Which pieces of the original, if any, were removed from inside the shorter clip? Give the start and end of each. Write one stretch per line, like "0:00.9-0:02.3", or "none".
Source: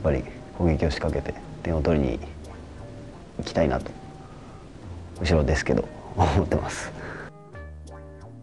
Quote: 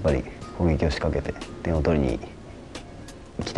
none